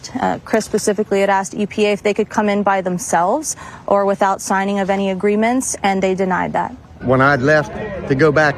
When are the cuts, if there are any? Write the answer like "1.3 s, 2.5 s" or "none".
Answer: 7.0 s